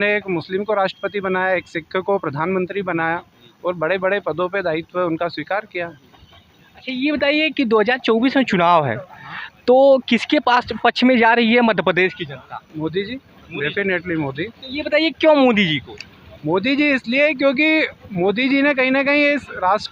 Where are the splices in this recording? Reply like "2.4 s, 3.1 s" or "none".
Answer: none